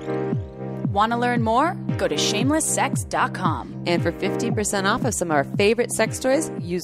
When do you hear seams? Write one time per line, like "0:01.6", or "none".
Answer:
0:00.9